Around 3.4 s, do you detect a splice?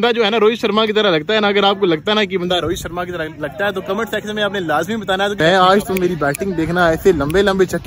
no; 1 cut; at 5.4 s

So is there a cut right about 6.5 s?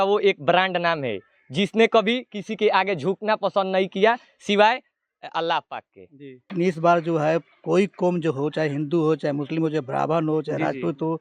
yes; 1 cut; at 6.5 s

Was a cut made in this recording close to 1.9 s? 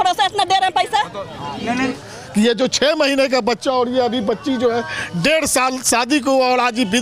yes; 1 cut; at 1.9 s

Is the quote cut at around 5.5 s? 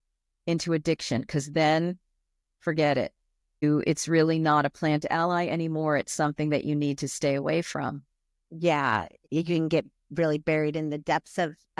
no; 2 cuts; at 3.6 s, 9.2 s

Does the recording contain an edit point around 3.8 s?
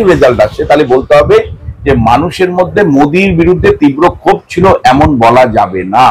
no; 0 cuts

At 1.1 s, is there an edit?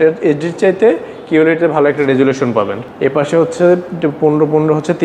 no; 2 cuts; at 2.8 s, 3.9 s

